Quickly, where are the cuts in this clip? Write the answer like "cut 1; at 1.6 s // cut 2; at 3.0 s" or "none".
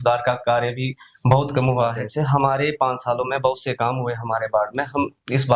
cut 1; at 2.0 s